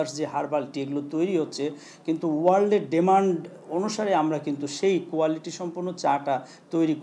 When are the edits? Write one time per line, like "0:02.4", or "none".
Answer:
none

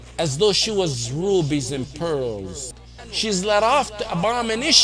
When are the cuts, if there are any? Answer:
0:02.8

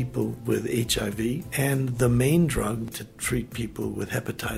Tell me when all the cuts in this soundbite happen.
0:01.5
0:02.9

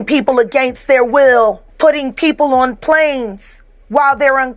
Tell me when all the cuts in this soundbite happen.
0:01.7

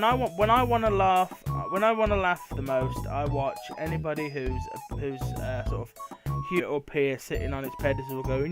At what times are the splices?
none

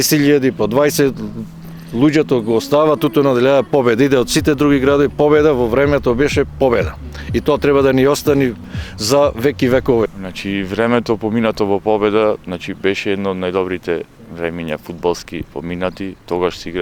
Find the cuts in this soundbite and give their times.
0:10.1

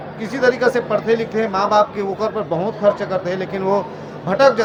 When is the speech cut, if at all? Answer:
none

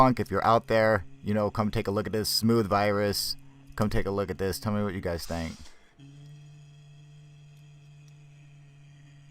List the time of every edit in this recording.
0:07.4

